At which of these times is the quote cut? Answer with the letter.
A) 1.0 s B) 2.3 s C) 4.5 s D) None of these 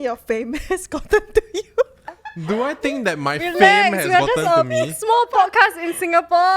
B